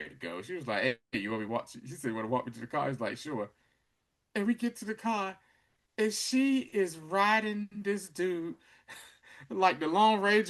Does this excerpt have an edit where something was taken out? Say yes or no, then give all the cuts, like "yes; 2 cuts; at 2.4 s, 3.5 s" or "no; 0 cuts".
no; 0 cuts